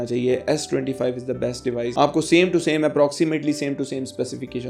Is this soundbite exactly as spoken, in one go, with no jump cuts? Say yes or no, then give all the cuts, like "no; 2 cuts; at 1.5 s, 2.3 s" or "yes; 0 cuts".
yes; 0 cuts